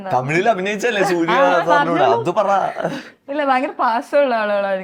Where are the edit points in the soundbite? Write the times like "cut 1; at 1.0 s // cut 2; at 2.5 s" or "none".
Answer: none